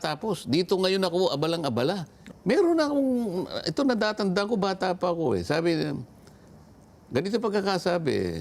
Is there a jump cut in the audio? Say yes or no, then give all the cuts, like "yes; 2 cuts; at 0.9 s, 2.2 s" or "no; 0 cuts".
yes; 1 cut; at 2.1 s